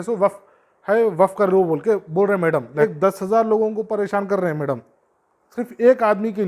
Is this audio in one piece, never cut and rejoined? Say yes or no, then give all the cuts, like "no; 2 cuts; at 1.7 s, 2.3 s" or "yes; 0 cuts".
no; 1 cut; at 2.9 s